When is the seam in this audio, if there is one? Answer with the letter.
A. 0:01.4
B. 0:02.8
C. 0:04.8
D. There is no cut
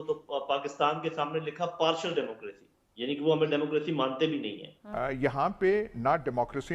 C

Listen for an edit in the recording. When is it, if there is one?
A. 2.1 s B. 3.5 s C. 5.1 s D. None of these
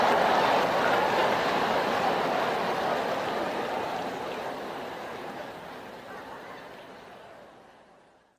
B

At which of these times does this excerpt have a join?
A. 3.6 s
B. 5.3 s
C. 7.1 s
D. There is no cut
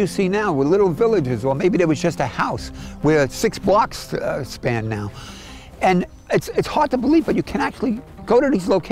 D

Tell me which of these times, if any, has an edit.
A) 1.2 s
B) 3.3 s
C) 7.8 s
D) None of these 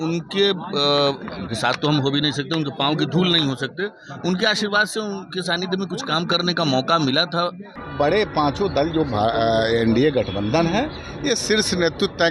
C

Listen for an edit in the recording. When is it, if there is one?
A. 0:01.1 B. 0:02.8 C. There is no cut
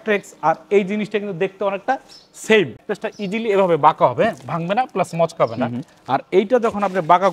B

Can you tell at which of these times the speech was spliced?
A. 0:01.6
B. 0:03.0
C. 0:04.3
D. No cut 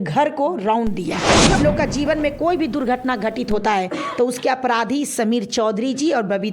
A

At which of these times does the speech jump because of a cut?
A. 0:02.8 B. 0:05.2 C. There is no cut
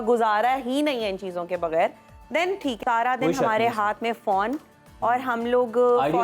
A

